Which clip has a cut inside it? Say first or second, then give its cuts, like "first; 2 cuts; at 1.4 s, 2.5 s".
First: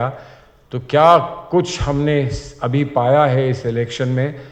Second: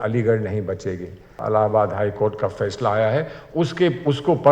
second; 1 cut; at 1.4 s